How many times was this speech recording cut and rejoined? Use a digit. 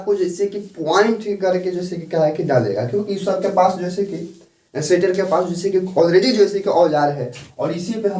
0